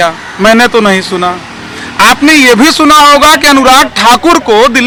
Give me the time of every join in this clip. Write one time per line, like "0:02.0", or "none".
none